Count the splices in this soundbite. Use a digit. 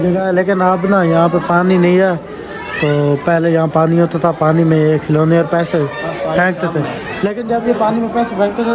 0